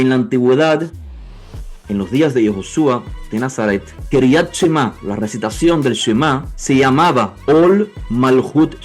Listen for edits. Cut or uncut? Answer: cut